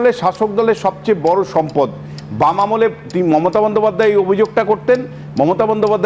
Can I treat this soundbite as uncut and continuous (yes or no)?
yes